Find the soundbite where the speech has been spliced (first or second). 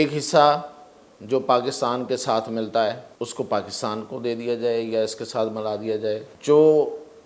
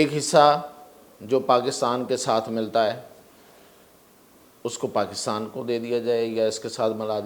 first